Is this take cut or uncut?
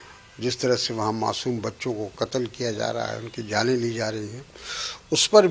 uncut